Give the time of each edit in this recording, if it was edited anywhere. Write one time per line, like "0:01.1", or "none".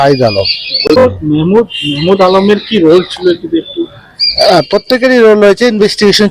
0:01.0